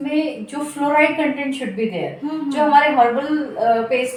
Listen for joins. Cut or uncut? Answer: uncut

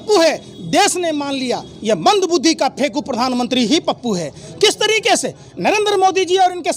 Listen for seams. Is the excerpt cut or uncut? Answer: uncut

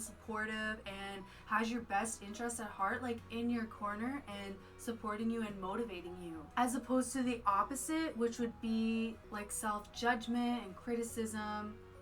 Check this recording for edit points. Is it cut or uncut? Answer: uncut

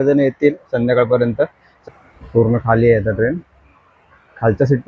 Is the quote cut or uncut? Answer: cut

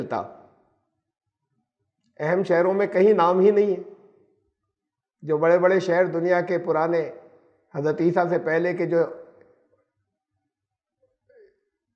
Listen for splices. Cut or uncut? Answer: uncut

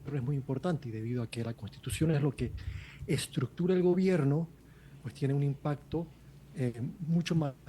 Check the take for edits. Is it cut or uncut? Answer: uncut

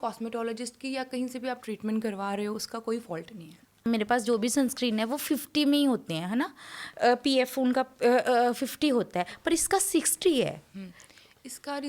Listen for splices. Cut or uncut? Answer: cut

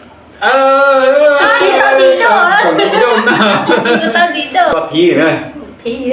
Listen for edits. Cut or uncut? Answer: cut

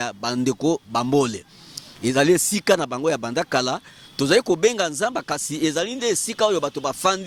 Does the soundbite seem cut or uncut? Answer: uncut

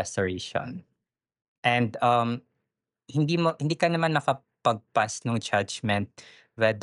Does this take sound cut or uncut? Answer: uncut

